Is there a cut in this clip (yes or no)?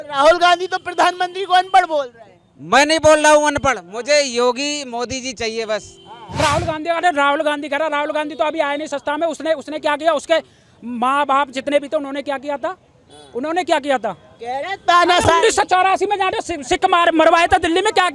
yes